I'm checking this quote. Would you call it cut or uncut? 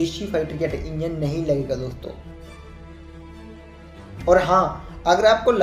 uncut